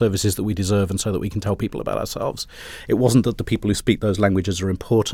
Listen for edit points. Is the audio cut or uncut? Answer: uncut